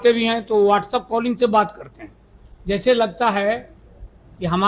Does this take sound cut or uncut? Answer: uncut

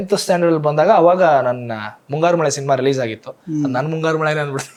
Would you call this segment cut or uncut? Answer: uncut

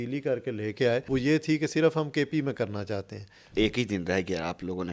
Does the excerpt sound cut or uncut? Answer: cut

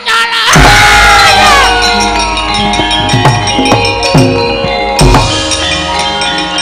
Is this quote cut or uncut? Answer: uncut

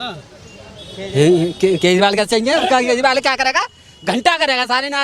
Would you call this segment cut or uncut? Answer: uncut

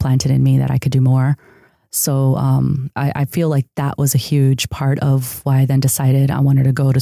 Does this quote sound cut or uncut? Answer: cut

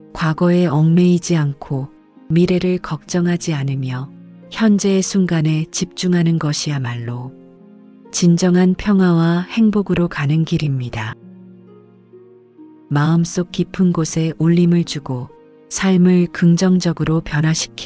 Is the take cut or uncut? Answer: uncut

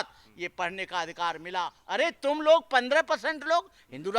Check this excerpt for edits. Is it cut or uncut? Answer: cut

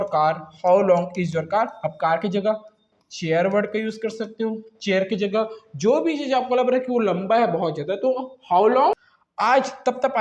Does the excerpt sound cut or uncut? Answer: cut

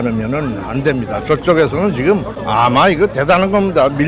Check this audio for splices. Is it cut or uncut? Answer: cut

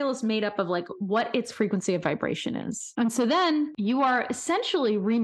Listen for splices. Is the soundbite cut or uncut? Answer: cut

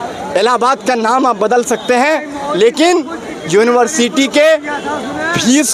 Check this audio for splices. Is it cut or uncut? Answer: uncut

